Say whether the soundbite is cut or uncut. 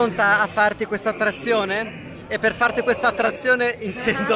uncut